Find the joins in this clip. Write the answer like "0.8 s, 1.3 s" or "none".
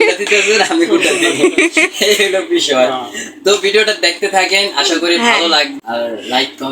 5.7 s